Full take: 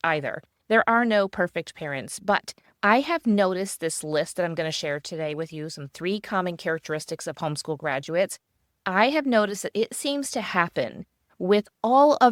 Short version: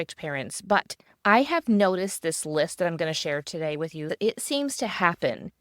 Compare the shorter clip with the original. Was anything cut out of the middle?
yes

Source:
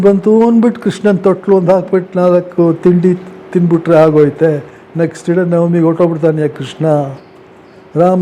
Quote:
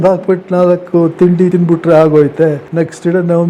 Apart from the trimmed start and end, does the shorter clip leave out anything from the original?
yes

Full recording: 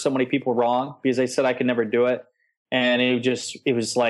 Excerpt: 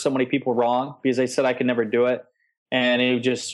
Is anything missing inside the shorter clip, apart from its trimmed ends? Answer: no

